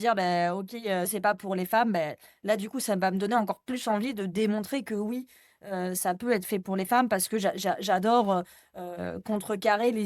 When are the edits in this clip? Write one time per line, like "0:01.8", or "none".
0:01.1